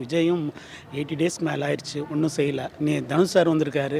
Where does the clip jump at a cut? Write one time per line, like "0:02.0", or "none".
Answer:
0:02.7